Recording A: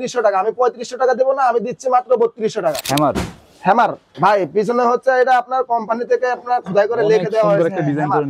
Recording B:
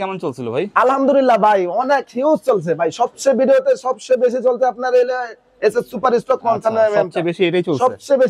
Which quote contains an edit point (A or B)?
A